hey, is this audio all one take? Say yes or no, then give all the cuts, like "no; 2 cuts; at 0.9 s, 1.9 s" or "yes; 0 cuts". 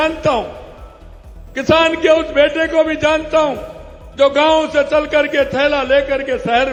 yes; 0 cuts